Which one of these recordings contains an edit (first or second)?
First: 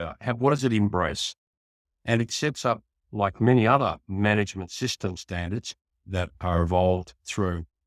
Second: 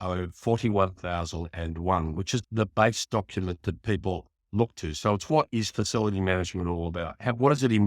second